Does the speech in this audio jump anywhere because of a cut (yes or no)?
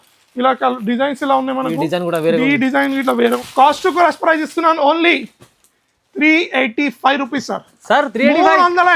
yes